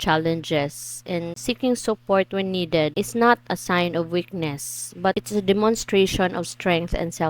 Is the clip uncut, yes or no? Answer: no